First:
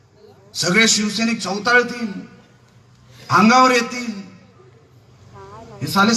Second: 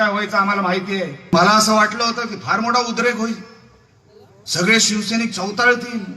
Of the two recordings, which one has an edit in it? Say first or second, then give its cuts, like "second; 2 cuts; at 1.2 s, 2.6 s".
second; 1 cut; at 1.3 s